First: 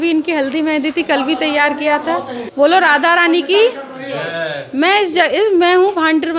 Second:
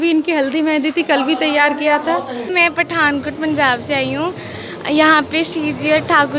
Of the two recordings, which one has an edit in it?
second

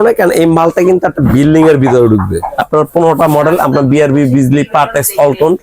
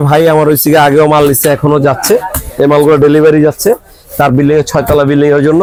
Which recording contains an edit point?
first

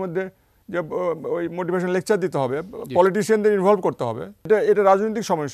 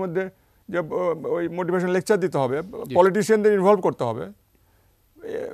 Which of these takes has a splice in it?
first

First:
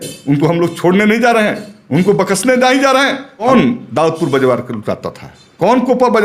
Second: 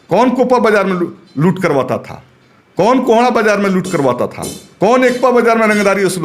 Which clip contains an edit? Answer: first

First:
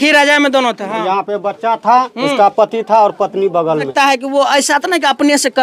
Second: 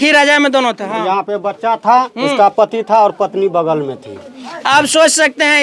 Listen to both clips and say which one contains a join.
first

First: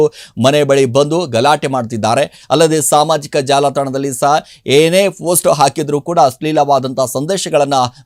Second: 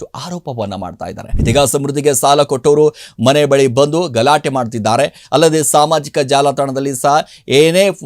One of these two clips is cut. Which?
second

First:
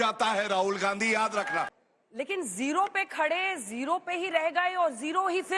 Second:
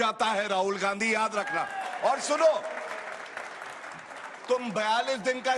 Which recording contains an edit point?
first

